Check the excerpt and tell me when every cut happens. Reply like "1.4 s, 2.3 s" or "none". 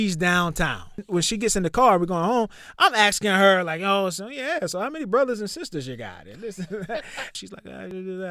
1.0 s, 7.3 s